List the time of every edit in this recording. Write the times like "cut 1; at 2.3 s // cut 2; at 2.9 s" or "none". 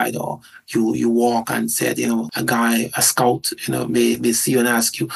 cut 1; at 2.3 s